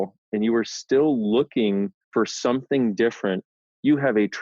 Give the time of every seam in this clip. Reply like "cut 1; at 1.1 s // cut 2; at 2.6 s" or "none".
cut 1; at 2.0 s // cut 2; at 3.5 s